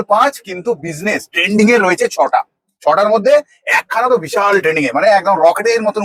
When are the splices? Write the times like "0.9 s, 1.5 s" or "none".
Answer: none